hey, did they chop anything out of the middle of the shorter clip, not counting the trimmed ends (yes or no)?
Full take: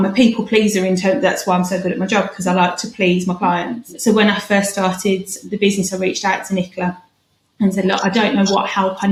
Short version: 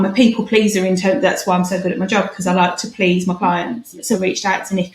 yes